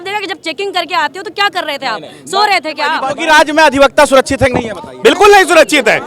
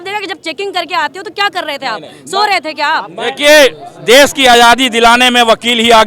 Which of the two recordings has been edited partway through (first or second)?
first